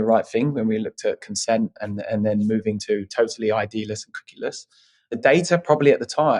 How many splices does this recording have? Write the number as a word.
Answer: zero